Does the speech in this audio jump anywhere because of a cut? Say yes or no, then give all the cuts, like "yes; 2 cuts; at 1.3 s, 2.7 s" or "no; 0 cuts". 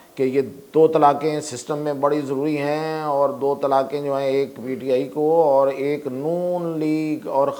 no; 0 cuts